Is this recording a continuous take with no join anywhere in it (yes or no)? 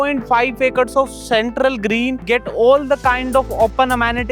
no